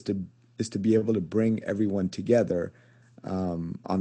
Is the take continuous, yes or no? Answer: yes